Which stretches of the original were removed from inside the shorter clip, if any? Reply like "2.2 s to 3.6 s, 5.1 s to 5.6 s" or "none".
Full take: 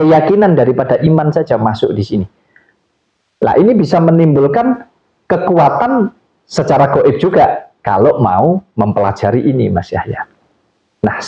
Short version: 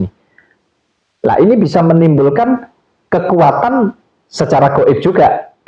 none